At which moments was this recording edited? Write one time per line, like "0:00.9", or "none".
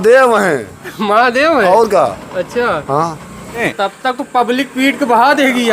0:03.7